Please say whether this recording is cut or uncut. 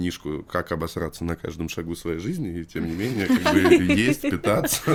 uncut